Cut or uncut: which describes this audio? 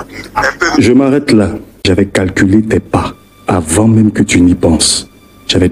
cut